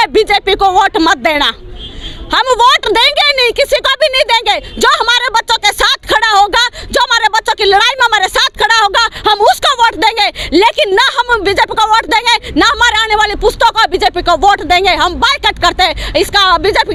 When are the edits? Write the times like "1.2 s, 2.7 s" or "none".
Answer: none